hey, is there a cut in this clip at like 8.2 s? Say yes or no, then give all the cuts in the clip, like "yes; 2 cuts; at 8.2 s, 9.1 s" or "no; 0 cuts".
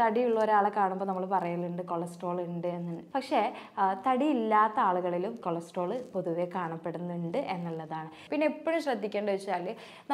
yes; 2 cuts; at 3.0 s, 8.2 s